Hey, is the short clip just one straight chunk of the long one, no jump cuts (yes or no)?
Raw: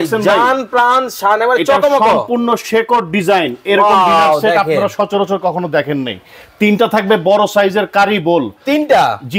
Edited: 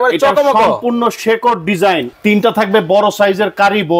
no